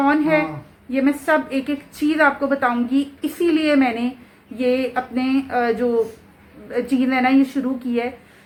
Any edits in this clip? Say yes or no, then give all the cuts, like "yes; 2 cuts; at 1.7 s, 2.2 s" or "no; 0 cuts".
no; 0 cuts